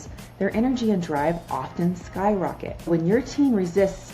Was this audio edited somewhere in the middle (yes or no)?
yes